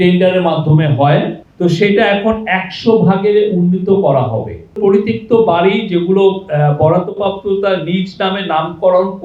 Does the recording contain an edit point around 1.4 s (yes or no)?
yes